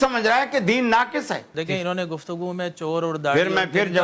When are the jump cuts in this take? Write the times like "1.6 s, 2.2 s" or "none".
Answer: 1.5 s